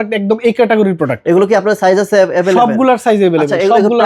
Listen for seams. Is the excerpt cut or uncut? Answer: uncut